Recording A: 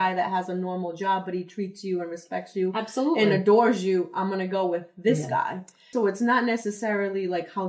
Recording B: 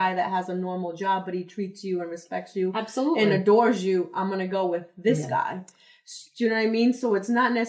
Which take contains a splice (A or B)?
A